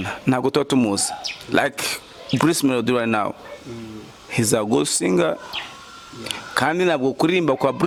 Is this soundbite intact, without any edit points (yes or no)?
yes